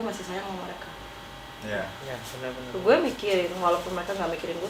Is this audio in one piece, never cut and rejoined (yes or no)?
yes